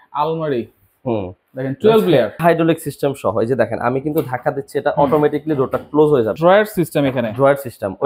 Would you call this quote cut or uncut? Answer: cut